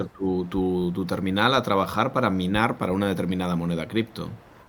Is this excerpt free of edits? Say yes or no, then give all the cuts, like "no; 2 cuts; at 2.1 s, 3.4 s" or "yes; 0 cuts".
yes; 0 cuts